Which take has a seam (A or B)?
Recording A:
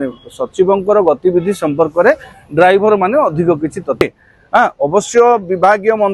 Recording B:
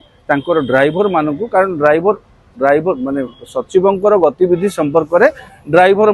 A